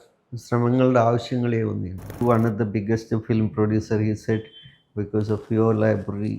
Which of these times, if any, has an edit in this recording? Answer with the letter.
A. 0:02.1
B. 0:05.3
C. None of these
A